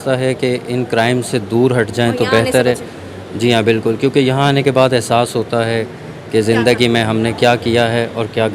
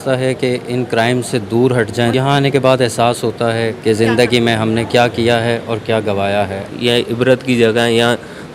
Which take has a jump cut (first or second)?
second